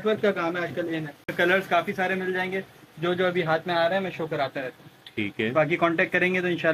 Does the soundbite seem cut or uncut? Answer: cut